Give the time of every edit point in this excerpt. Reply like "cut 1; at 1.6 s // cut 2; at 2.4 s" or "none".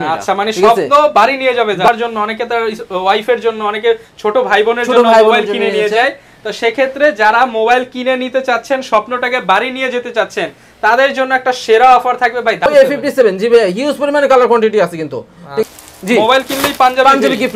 cut 1; at 1.9 s // cut 2; at 12.7 s // cut 3; at 15.6 s